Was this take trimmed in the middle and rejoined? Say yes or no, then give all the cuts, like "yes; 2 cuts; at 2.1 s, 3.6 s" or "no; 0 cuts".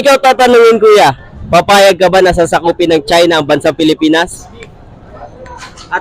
no; 0 cuts